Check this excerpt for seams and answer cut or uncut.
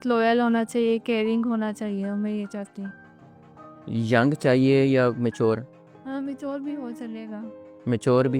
uncut